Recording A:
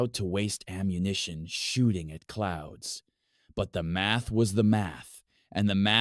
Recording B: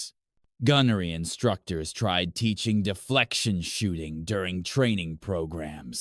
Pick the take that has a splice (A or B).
A